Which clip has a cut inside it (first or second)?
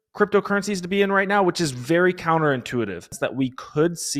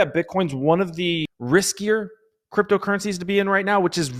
first